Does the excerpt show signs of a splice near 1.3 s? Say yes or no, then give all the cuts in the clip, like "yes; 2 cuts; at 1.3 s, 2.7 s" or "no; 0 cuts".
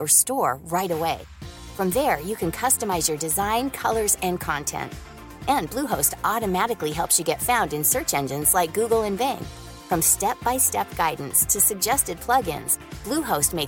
no; 0 cuts